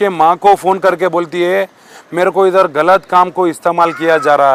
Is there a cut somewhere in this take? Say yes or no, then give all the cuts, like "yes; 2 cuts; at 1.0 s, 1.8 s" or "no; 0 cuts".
no; 0 cuts